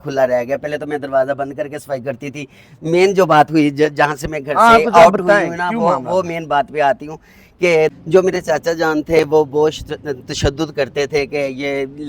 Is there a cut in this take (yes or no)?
yes